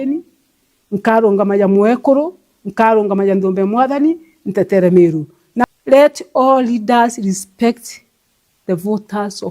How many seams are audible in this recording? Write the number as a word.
one